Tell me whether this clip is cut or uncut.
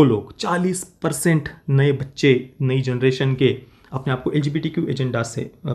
uncut